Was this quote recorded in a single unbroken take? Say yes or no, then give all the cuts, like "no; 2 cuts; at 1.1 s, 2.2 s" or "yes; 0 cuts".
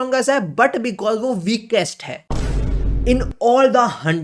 yes; 0 cuts